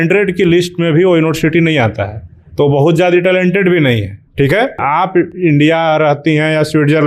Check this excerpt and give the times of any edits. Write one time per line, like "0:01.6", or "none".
0:04.8